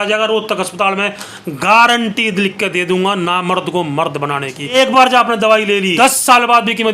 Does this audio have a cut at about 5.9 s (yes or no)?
yes